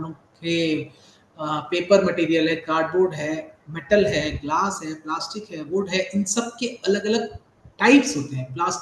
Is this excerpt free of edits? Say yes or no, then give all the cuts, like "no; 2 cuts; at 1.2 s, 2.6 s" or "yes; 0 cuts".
yes; 0 cuts